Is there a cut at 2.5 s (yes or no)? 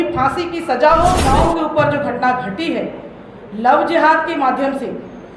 no